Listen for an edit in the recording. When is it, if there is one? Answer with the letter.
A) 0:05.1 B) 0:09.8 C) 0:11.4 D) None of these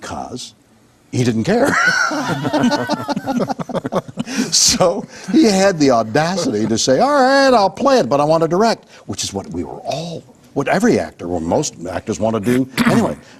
D